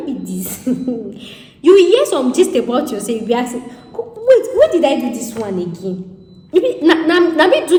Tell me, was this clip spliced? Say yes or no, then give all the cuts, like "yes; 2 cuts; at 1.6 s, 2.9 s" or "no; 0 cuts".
no; 0 cuts